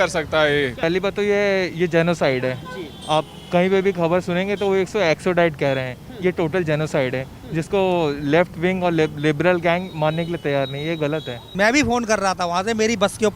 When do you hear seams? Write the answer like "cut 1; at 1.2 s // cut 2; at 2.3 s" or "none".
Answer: cut 1; at 0.8 s // cut 2; at 11.5 s